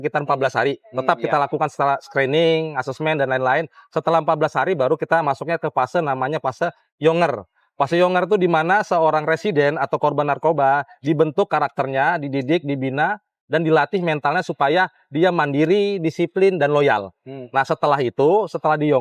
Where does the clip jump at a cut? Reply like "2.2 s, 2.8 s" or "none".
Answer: none